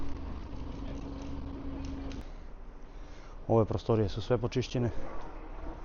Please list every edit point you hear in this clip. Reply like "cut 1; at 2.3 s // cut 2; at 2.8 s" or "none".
cut 1; at 2.2 s